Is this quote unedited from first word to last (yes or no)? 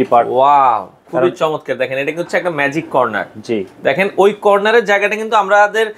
yes